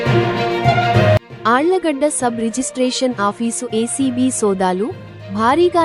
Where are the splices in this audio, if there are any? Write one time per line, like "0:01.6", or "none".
0:01.3